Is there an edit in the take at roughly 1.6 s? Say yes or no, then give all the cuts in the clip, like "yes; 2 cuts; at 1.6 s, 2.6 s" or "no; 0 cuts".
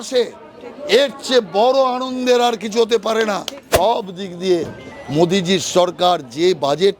no; 1 cut; at 3.7 s